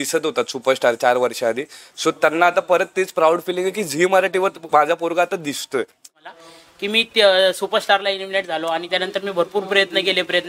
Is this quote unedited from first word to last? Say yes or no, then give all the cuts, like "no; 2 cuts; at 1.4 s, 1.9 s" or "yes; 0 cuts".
no; 1 cut; at 6.2 s